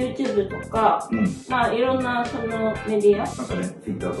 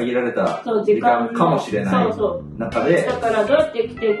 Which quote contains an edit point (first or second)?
first